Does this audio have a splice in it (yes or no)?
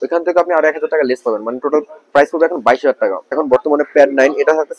yes